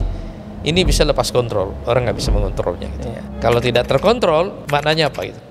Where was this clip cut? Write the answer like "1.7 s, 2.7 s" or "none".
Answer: 3.2 s, 4.6 s